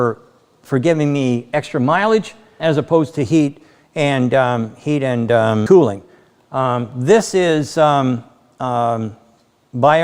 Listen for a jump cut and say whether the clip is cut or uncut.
cut